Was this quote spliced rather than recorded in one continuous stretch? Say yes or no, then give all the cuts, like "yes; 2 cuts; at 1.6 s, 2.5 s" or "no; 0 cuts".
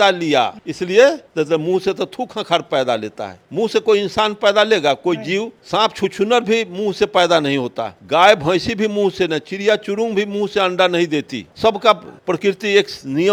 no; 0 cuts